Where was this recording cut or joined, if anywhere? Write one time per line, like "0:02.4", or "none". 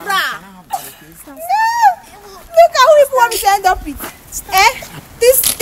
none